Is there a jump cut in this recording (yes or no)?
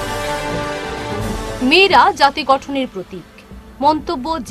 yes